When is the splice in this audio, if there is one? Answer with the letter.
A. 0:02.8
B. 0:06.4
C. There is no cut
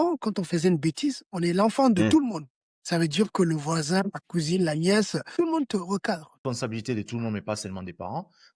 B